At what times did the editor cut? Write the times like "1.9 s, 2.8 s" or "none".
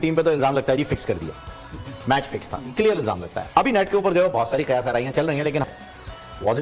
5.6 s